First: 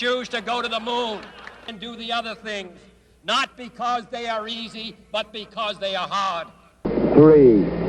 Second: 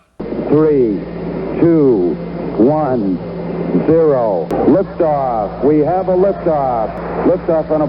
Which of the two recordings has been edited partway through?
second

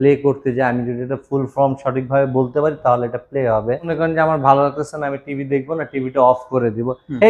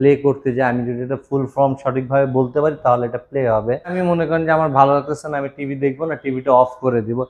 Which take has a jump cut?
first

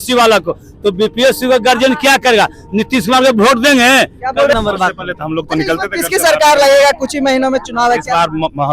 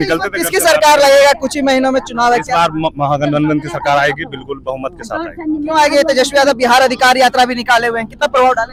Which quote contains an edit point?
first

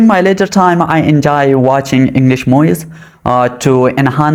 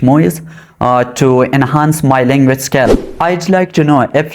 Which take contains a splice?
second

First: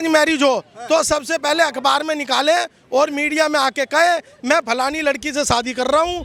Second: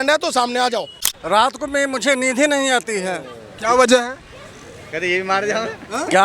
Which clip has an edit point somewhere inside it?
second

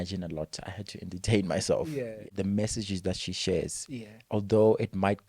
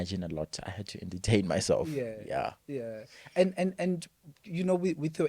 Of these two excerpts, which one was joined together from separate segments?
first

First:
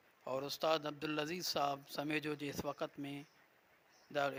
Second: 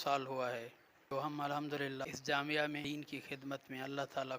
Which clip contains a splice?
second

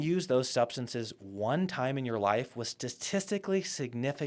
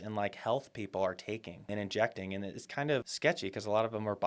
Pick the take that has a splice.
second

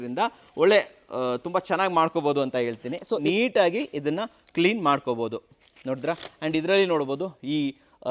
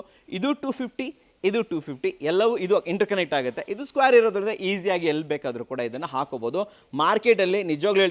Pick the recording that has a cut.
first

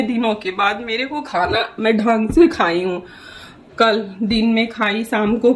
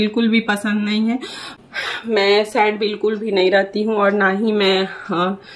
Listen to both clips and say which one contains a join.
second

